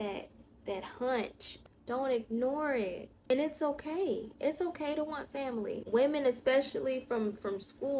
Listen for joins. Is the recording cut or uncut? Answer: cut